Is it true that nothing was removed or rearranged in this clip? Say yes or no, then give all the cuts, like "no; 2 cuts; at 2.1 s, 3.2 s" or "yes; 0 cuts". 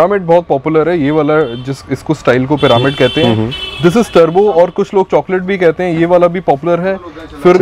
yes; 0 cuts